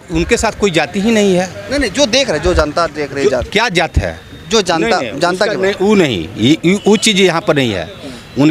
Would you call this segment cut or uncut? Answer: uncut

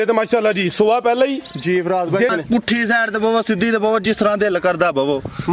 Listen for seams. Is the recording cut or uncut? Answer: cut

